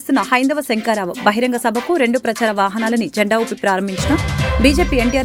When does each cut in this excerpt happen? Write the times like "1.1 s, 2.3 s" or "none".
none